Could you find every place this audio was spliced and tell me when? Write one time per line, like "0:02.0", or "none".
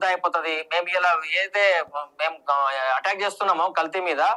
none

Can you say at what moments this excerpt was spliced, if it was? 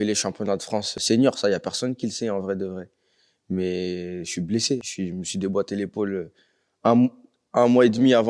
0:00.9
0:04.9

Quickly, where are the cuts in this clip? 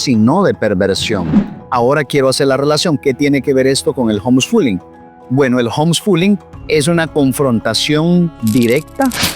0:01.5
0:08.3

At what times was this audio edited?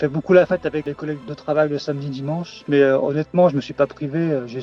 0:00.9

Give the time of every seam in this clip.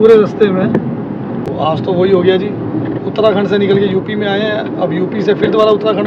0:01.5

